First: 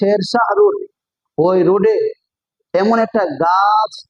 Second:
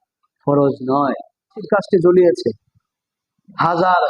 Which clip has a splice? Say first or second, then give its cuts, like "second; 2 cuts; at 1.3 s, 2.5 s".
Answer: second; 1 cut; at 1.6 s